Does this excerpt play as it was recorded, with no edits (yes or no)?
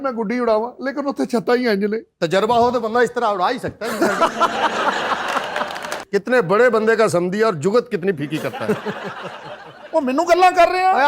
no